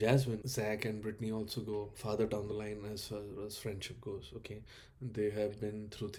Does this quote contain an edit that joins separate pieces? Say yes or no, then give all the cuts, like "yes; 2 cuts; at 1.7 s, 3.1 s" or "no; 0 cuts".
no; 0 cuts